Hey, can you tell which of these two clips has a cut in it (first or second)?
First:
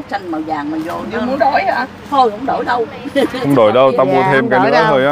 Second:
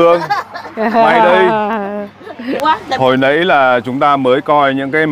second